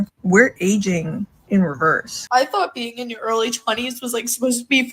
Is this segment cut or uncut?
cut